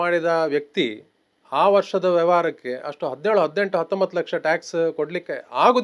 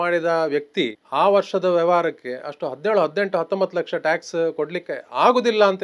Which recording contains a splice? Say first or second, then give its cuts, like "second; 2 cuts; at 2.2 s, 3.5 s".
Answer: second; 1 cut; at 1.0 s